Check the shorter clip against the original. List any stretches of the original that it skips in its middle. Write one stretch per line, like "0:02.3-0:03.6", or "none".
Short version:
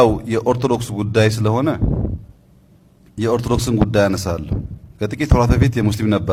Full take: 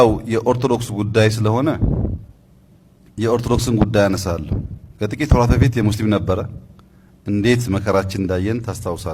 none